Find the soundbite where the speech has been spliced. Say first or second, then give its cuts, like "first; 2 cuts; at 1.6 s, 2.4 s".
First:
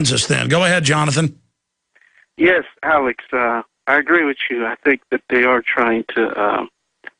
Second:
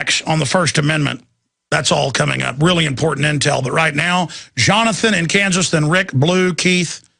second; 1 cut; at 3.9 s